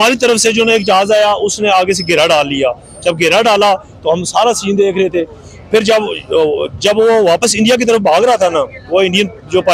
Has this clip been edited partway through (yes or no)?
no